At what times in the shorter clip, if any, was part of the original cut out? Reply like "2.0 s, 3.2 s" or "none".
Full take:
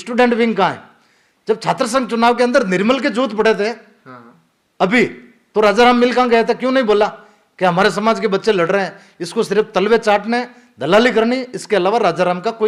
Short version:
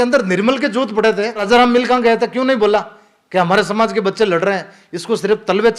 1.4 s

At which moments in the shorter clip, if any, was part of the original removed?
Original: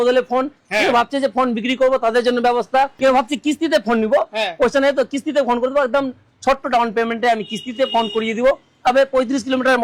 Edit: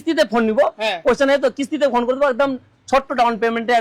none

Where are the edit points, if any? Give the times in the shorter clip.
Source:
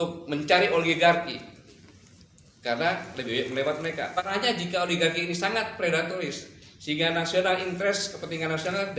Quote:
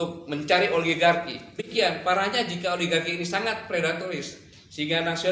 2.0 s

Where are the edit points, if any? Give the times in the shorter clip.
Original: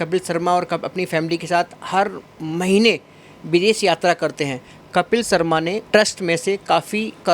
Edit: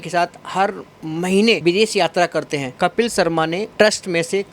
1.6 s, 2.6 s

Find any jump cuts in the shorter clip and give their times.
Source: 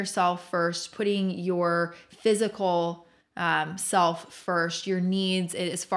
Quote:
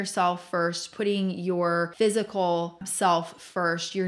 1.9 s, 2.9 s

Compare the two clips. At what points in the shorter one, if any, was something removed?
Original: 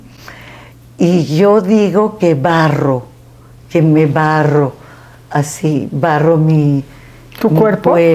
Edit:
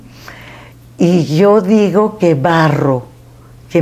none

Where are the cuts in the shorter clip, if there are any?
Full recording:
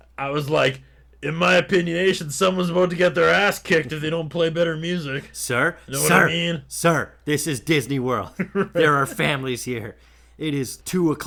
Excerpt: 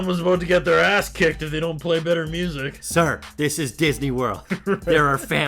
2.8 s

